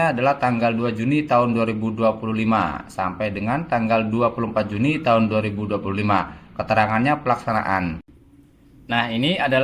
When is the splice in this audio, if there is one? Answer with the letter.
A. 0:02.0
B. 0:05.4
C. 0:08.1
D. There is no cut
C